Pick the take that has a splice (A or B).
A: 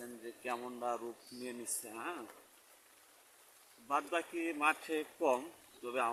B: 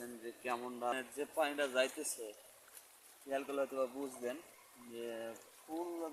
B